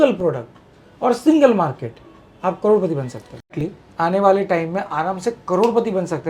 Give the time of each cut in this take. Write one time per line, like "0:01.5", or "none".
0:03.5